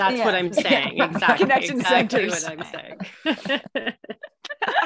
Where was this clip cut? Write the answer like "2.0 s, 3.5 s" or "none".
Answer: none

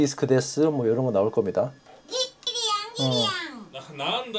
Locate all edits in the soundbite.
none

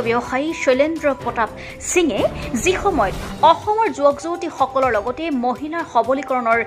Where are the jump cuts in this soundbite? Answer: none

